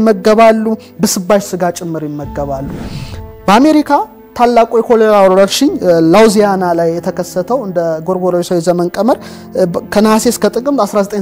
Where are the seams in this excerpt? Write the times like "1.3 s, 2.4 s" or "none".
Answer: none